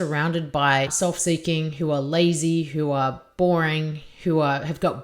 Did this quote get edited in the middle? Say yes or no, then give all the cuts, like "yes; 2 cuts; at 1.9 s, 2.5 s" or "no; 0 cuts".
yes; 1 cut; at 0.9 s